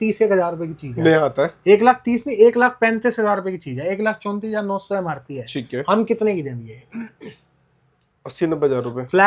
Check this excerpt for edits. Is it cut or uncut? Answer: uncut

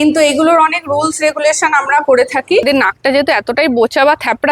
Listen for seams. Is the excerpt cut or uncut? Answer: cut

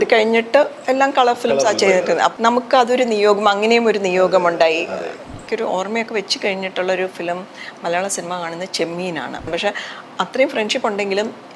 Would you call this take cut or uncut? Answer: cut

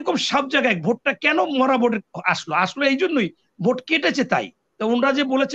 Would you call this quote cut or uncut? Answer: uncut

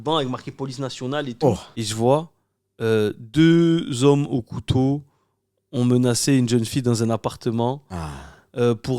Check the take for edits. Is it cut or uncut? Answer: cut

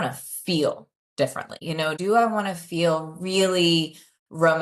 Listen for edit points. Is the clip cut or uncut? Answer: cut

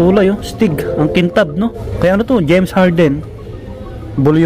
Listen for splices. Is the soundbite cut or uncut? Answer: cut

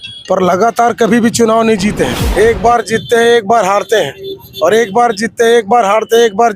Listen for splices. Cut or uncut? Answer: cut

